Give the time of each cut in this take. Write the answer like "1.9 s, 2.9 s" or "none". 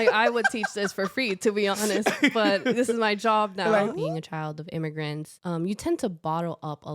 4.0 s, 5.3 s